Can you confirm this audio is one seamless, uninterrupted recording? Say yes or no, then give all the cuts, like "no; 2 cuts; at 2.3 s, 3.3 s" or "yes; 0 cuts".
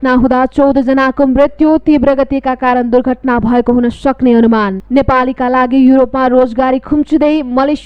no; 1 cut; at 4.8 s